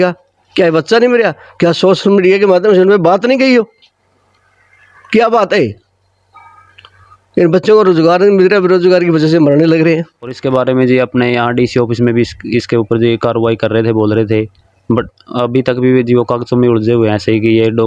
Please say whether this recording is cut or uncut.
cut